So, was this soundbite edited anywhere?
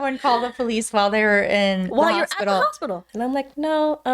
yes; 1 cut; at 3.1 s

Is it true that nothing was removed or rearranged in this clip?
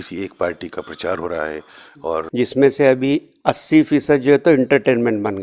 no; 1 cut; at 2.2 s

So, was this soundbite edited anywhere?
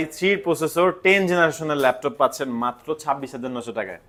no; 0 cuts

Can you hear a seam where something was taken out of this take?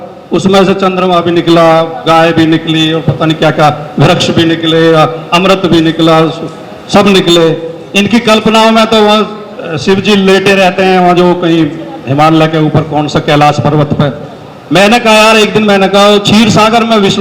no; 0 cuts

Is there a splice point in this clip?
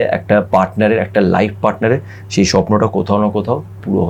no; 0 cuts

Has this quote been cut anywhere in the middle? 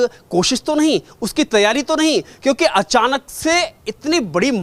no; 0 cuts

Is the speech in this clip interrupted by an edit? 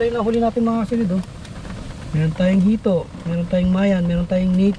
no; 0 cuts

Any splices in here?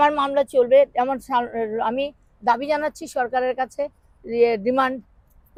no; 0 cuts

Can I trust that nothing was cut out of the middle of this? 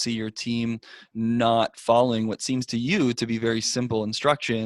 yes; 0 cuts

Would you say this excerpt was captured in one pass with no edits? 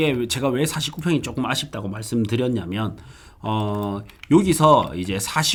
yes; 0 cuts

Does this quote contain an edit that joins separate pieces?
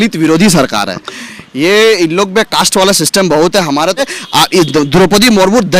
yes; 1 cut; at 4.0 s

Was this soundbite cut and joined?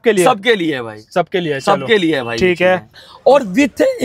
yes; 1 cut; at 3.0 s

